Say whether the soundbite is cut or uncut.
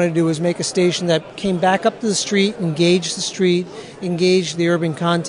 uncut